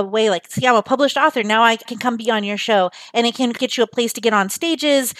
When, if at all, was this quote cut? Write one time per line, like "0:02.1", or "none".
0:01.9
0:03.5